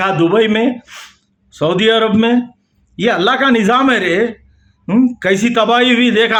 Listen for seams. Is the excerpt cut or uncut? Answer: uncut